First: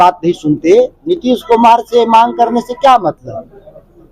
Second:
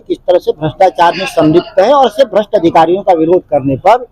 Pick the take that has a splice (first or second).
first